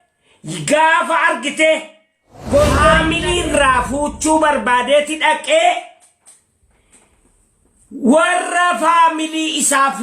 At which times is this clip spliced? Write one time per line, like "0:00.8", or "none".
0:03.0